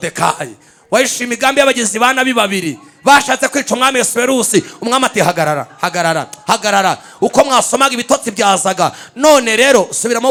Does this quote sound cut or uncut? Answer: uncut